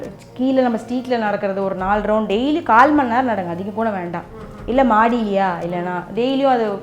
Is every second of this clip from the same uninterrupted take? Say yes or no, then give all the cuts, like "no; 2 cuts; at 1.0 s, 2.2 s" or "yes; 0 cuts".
yes; 0 cuts